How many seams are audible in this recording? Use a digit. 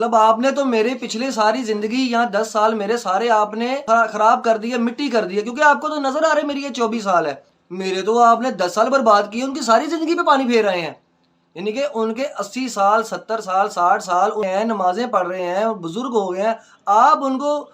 3